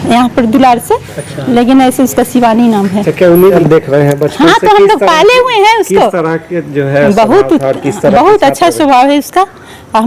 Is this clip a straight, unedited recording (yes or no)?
no